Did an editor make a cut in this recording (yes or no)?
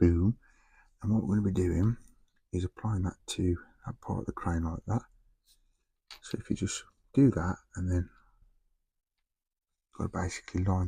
no